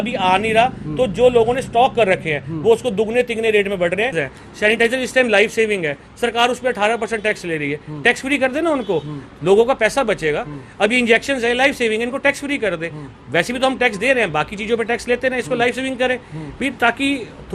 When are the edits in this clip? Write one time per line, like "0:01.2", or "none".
0:04.1